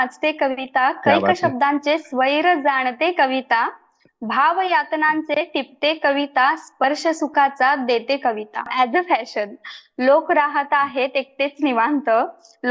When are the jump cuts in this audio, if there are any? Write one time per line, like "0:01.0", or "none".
0:08.7